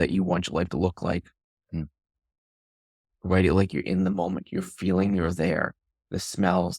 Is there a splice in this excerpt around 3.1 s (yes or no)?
yes